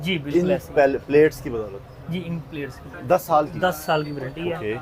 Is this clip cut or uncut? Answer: cut